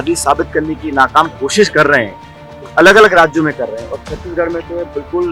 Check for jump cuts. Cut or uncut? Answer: uncut